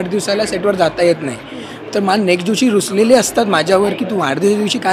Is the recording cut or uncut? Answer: uncut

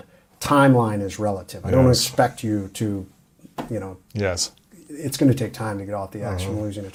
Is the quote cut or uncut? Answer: uncut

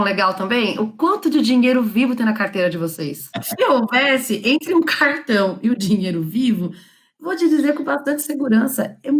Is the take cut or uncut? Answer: cut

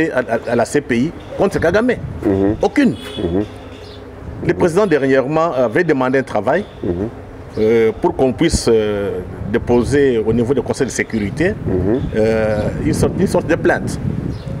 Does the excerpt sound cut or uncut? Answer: uncut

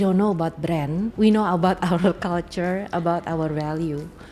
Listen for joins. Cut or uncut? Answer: cut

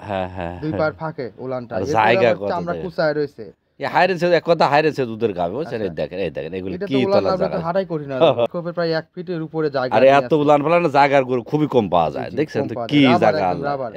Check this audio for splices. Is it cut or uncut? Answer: cut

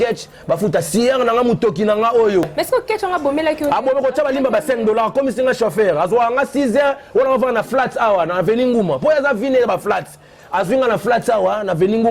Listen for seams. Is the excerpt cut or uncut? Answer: cut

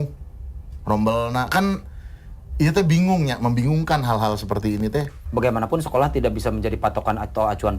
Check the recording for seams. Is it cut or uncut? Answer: cut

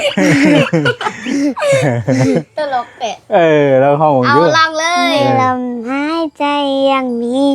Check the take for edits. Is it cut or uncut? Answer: uncut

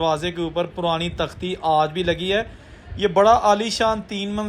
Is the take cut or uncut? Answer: uncut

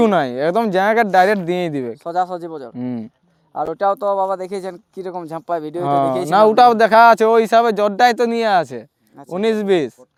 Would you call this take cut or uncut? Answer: uncut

